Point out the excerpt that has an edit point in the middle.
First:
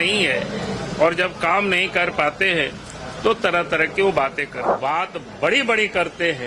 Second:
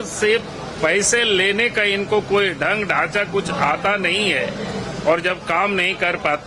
first; 1 cut; at 4.6 s

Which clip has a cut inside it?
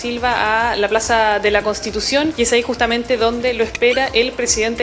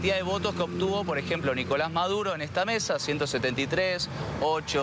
first; 1 cut; at 2.3 s

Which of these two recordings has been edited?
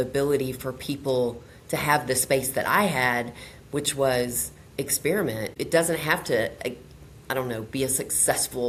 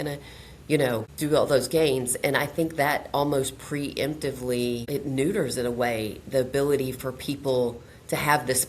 second; 2 cuts; at 1.1 s, 4.8 s

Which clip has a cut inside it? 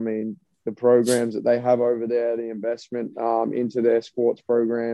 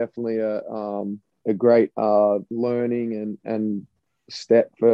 second; 2 cuts; at 1.3 s, 2.5 s

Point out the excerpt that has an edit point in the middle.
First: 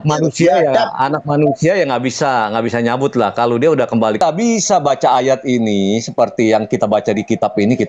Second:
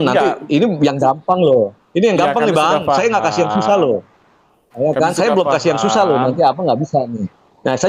first; 1 cut; at 4.2 s

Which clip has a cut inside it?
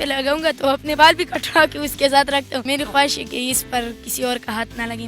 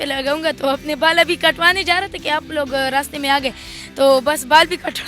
first; 2 cuts; at 0.9 s, 2.7 s

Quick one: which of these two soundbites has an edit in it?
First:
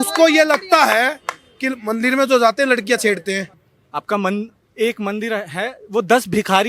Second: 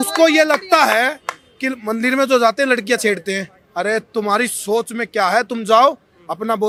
first; 1 cut; at 3.6 s

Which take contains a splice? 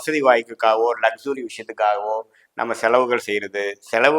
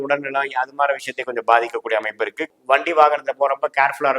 second; 1 cut; at 2.5 s

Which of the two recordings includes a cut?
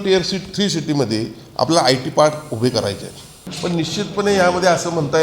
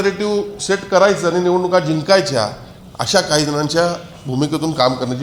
first; 1 cut; at 3.4 s

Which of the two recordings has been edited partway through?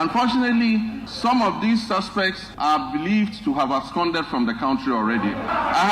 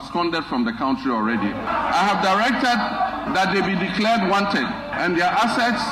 first; 2 cuts; at 1.0 s, 2.4 s

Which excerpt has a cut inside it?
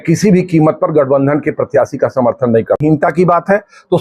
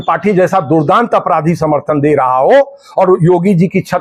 first; 1 cut; at 2.8 s

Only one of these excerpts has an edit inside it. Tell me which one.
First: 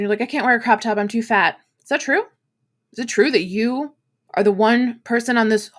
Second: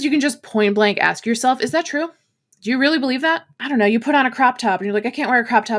second; 1 cut; at 3.6 s

